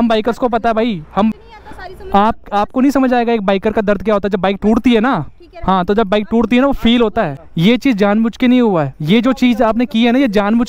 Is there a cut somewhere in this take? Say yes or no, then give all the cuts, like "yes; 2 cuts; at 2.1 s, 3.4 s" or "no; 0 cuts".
yes; 2 cuts; at 1.3 s, 7.4 s